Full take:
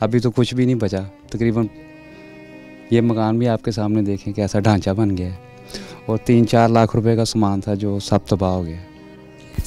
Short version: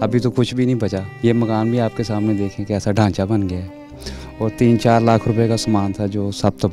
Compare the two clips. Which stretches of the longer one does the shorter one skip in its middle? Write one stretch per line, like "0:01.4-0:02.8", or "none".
0:01.1-0:02.8